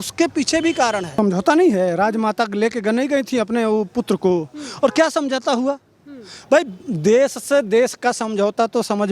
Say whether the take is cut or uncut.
cut